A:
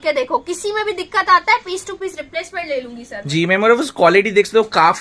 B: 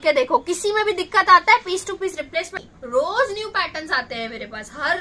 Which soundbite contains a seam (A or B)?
B